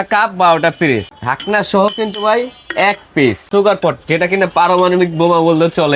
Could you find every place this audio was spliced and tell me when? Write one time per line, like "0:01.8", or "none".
0:01.1
0:03.5